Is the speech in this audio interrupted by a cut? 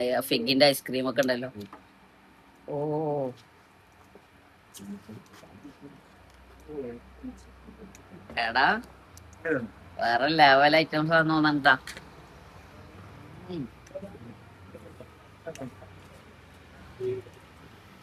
no; 0 cuts

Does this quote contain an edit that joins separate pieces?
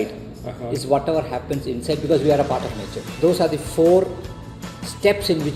yes; 1 cut; at 3.1 s

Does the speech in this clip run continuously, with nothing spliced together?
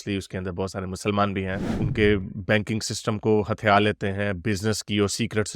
no; 1 cut; at 1.8 s

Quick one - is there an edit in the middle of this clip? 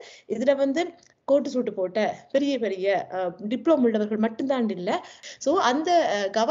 yes; 1 cut; at 5.1 s

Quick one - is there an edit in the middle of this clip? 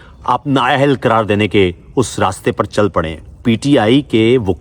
yes; 1 cut; at 3.4 s

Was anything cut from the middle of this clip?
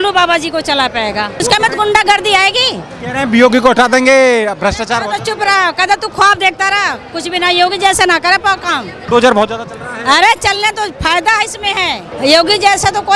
yes; 3 cuts; at 1.4 s, 8.9 s, 12.1 s

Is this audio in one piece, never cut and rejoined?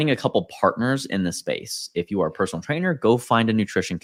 yes; 0 cuts

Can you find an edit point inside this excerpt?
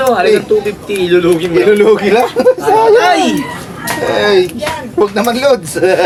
no; 0 cuts

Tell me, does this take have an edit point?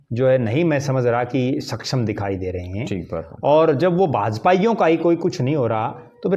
no; 0 cuts

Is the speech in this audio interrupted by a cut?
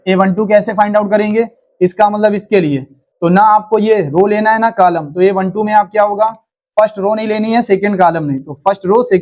no; 0 cuts

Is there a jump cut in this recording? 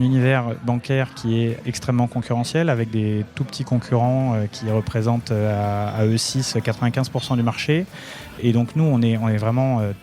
yes; 2 cuts; at 1.6 s, 8.4 s

